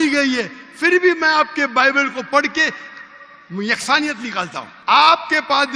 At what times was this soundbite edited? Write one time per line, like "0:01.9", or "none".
0:04.6

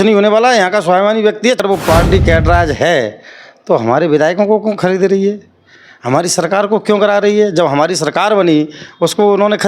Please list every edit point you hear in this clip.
0:01.6

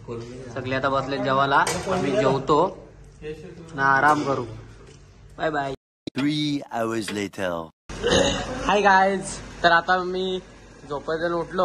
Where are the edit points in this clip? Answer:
none

